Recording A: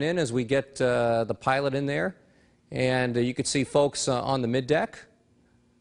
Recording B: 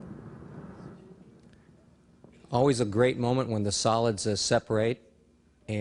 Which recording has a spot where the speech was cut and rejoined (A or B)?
A